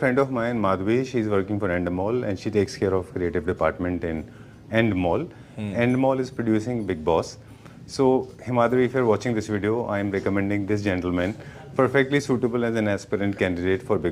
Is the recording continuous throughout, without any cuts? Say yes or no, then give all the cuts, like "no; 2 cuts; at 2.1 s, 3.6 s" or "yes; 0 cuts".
yes; 0 cuts